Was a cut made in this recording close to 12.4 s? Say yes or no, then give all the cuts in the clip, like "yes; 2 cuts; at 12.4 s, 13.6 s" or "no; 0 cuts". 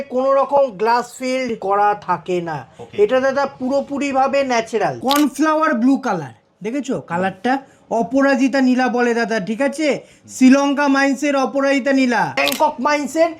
yes; 3 cuts; at 1.6 s, 5.0 s, 12.4 s